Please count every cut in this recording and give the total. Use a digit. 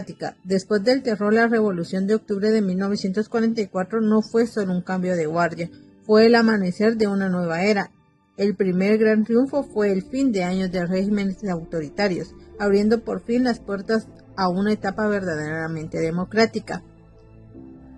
1